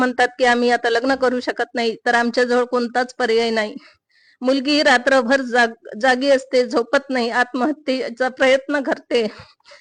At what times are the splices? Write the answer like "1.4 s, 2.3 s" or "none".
none

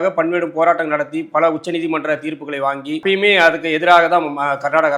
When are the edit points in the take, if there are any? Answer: 3.0 s

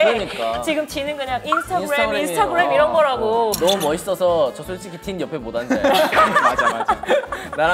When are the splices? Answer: 3.6 s

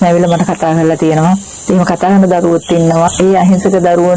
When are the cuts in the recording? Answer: 3.1 s

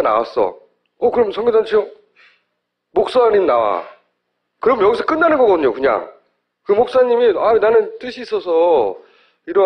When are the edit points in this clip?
none

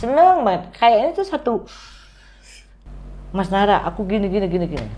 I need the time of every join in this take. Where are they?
2.7 s

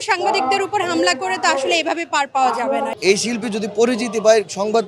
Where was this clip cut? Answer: 2.9 s

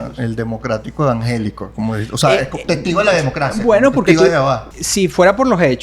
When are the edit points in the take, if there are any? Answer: 4.7 s

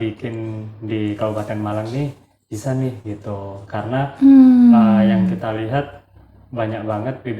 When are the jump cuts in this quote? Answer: none

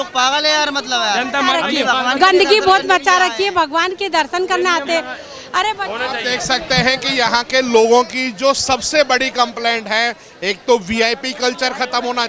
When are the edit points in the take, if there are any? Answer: none

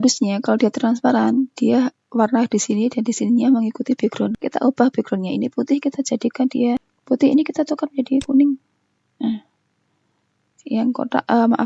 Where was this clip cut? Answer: 4.4 s, 6.9 s

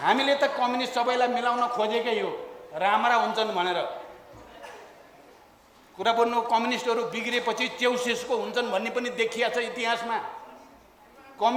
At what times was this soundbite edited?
none

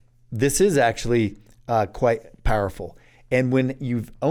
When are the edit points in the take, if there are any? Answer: none

